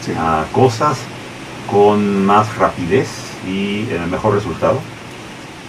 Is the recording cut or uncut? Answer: cut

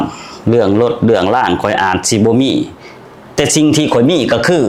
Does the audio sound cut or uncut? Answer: uncut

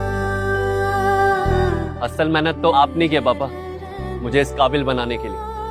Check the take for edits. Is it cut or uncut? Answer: cut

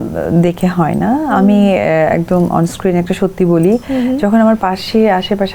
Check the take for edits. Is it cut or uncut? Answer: uncut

